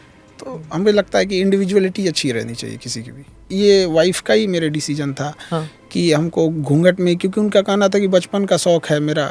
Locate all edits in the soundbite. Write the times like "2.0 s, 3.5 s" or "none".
3.5 s